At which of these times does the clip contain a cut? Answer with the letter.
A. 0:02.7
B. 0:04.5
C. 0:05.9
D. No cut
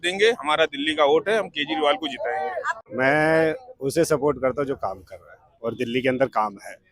A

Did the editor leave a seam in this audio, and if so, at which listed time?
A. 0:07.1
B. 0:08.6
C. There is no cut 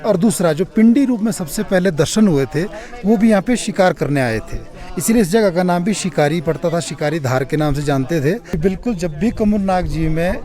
B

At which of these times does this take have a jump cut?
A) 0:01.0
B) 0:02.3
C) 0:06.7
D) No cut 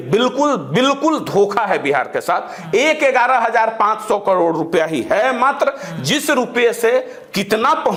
D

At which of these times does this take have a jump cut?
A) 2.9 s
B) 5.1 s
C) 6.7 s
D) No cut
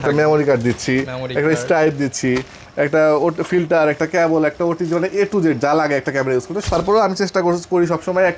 C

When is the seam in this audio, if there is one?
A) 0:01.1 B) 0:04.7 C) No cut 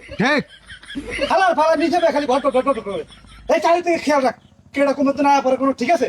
A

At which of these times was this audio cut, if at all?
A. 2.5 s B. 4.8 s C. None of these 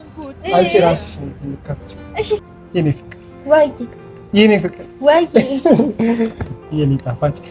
A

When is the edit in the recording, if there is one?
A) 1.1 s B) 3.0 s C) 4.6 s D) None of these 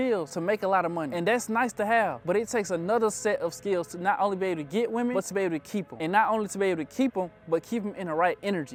D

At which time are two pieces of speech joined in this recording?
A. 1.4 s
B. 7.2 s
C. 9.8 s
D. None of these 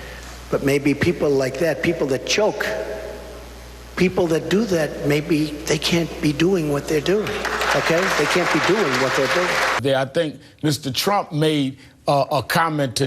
C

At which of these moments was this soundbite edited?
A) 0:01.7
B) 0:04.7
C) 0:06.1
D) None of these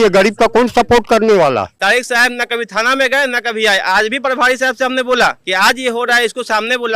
A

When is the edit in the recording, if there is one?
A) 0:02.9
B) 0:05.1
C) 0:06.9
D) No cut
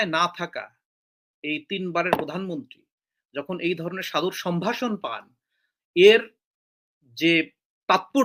D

